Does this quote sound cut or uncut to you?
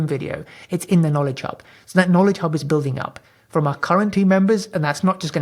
uncut